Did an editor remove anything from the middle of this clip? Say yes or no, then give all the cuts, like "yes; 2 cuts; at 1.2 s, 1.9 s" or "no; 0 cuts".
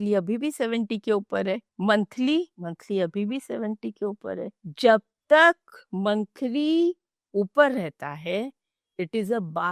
no; 0 cuts